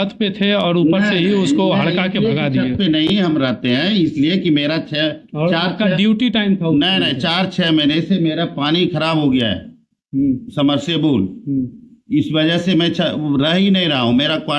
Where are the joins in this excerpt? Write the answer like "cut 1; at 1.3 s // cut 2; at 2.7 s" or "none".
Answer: none